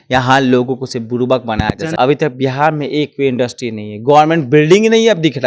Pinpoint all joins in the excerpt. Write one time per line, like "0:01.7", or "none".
0:01.9